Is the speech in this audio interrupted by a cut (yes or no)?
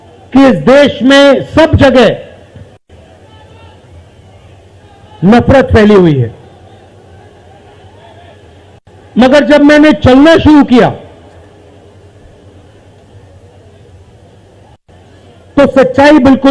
no